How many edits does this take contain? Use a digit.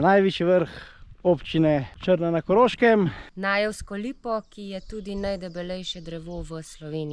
2